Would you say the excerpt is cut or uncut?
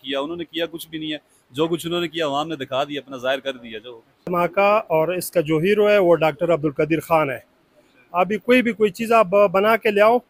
cut